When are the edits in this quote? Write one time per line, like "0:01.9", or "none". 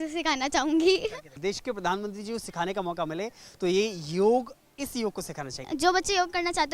0:01.3
0:05.6